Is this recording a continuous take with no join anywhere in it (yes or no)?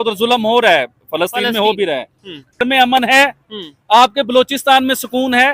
no